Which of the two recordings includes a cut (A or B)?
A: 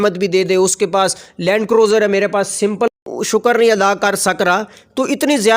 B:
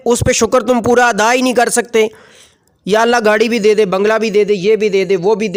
A